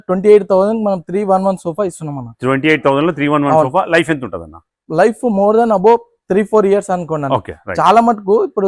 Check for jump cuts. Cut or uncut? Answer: uncut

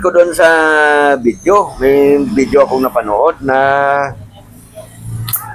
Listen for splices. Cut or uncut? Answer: uncut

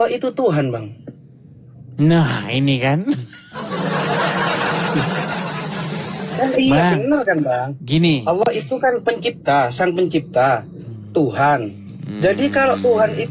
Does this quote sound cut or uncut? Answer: uncut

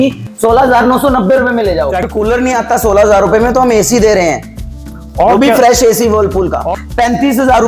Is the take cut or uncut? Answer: cut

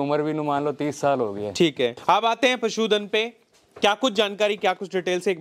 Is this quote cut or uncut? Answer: cut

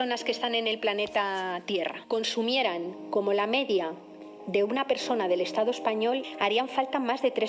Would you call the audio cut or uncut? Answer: cut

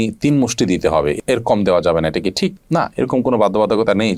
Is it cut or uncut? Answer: uncut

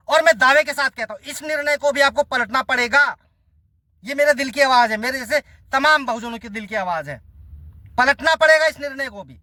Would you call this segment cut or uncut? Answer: uncut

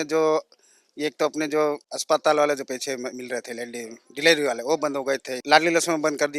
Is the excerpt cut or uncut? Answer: cut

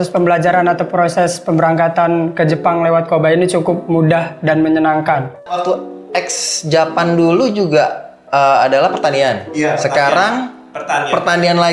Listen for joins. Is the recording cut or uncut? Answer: cut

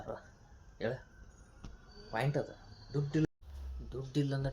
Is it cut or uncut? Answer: cut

